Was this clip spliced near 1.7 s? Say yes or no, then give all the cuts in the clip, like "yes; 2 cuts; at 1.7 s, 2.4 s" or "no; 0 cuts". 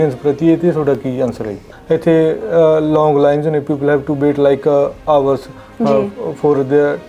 yes; 1 cut; at 1.7 s